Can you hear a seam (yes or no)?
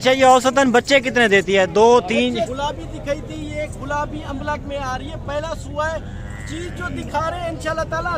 yes